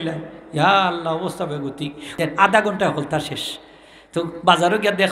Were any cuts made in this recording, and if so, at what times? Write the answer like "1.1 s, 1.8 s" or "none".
2.1 s